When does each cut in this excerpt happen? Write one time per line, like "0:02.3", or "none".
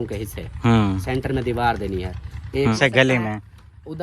0:02.8